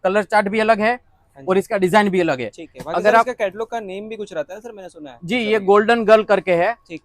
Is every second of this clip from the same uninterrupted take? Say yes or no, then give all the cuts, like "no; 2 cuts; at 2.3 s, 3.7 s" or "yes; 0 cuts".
yes; 0 cuts